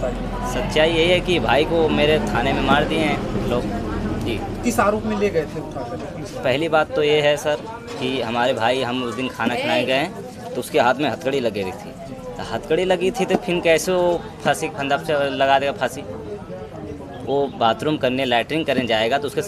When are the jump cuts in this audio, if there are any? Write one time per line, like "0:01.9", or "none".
none